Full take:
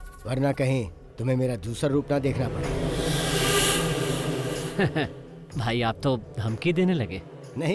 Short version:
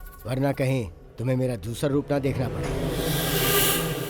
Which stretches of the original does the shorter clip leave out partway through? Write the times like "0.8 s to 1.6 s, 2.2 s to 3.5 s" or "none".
none